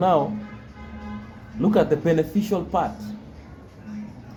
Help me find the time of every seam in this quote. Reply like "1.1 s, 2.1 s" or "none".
none

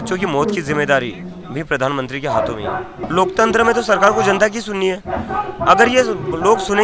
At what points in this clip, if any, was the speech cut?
3.1 s

